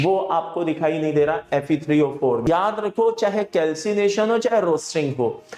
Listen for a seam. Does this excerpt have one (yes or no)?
yes